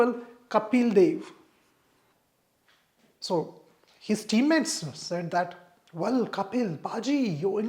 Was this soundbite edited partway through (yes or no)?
yes